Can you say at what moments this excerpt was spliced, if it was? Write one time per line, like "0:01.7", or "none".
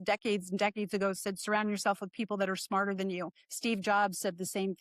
none